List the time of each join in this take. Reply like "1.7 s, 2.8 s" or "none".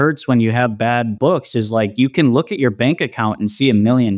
1.1 s